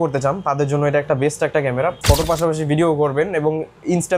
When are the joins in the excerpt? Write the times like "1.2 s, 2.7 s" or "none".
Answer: 2.0 s